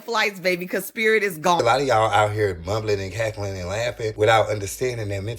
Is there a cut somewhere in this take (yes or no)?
yes